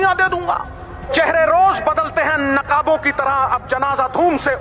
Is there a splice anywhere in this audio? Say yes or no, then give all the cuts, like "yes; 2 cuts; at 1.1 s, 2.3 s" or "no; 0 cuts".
yes; 1 cut; at 1.1 s